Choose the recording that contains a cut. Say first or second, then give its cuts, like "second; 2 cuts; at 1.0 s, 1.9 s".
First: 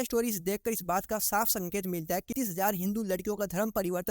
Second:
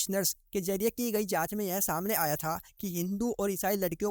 first; 1 cut; at 2.3 s